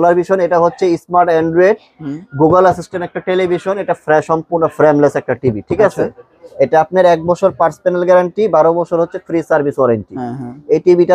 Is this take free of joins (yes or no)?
yes